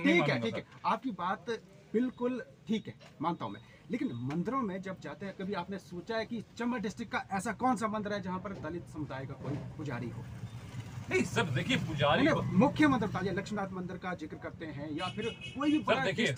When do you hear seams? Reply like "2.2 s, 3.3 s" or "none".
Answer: none